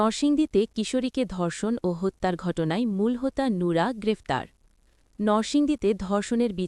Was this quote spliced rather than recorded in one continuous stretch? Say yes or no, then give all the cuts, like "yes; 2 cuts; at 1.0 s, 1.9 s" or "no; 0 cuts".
no; 0 cuts